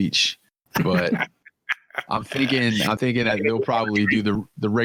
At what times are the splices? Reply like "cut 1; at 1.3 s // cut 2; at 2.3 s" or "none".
none